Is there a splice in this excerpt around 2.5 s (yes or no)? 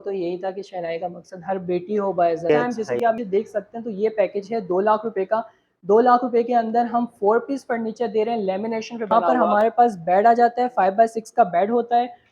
yes